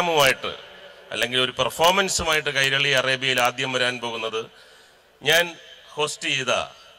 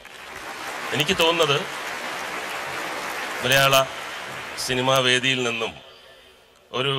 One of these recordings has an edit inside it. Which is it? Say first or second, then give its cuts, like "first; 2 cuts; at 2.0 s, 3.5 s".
second; 1 cut; at 1.0 s